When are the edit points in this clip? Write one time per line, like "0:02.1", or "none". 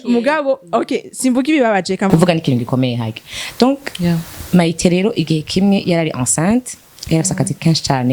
0:02.1

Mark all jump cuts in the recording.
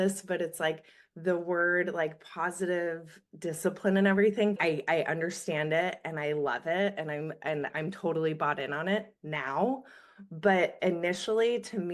0:04.6

